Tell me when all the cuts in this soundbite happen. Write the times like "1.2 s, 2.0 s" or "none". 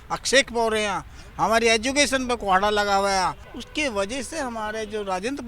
3.5 s